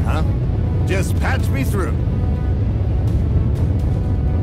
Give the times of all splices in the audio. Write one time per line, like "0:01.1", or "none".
none